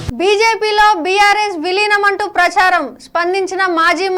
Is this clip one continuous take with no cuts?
yes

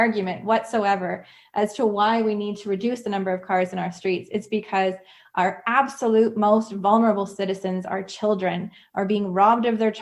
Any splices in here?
no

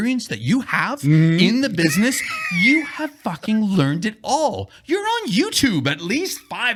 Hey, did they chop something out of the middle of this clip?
no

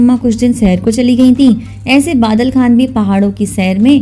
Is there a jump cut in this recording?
no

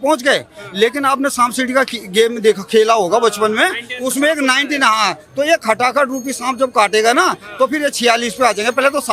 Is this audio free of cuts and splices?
yes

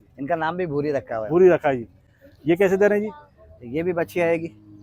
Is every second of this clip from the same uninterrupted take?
yes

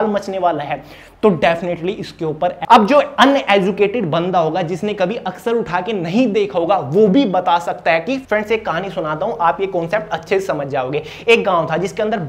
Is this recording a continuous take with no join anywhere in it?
no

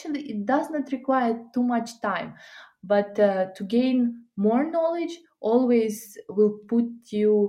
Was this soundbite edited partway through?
no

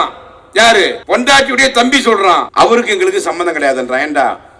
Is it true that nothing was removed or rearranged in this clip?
no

